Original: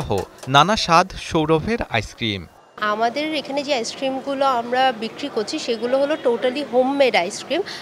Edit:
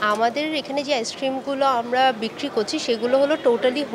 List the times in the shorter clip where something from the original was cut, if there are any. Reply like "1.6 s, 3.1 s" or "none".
none